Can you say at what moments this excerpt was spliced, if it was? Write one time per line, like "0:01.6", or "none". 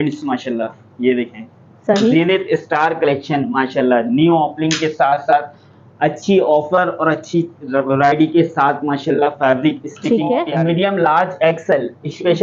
0:10.5